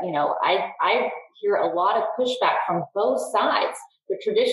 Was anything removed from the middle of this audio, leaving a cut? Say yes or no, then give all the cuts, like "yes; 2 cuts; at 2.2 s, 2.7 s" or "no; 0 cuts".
no; 0 cuts